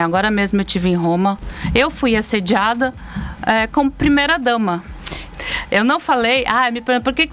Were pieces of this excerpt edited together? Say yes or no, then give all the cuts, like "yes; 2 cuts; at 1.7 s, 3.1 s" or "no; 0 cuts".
yes; 1 cut; at 1.5 s